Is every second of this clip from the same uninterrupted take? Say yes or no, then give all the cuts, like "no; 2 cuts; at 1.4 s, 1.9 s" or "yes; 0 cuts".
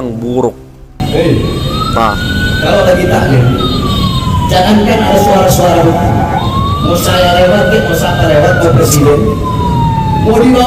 no; 1 cut; at 1.0 s